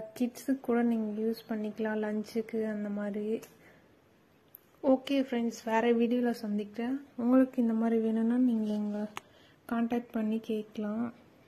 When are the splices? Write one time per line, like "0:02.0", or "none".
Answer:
none